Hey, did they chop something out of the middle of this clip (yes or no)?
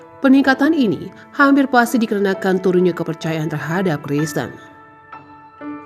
yes